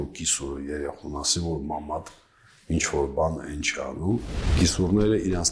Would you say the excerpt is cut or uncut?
cut